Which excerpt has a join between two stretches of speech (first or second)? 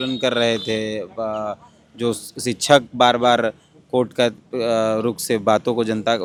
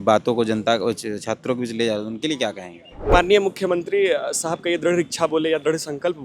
second